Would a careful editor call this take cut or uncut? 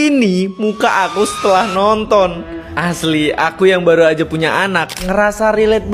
uncut